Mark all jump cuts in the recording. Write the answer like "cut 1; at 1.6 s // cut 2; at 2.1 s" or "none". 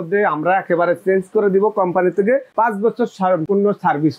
cut 1; at 2.5 s // cut 2; at 3.4 s